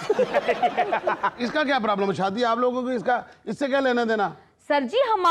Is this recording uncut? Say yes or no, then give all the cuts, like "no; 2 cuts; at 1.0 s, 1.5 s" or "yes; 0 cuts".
no; 1 cut; at 1.3 s